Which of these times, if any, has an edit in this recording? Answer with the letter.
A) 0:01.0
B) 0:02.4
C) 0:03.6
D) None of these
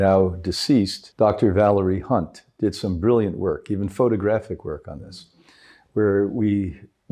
A